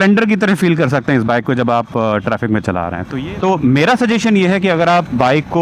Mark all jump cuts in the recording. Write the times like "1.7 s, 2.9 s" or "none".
3.0 s